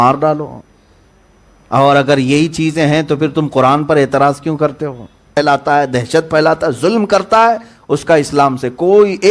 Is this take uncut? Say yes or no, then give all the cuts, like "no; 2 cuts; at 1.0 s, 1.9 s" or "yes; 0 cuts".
no; 1 cut; at 5.4 s